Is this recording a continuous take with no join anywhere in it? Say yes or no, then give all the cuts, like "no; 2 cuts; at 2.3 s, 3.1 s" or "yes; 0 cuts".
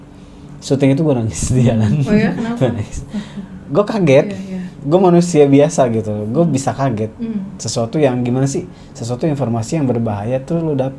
yes; 0 cuts